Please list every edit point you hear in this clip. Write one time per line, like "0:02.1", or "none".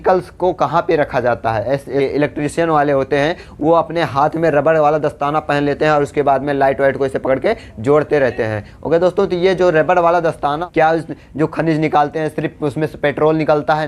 0:02.0
0:10.6